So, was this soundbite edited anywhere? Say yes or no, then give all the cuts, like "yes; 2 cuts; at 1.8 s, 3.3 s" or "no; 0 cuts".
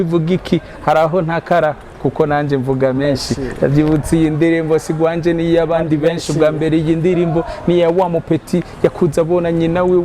no; 0 cuts